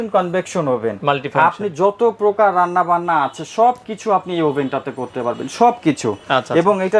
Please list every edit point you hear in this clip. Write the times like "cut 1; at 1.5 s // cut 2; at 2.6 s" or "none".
none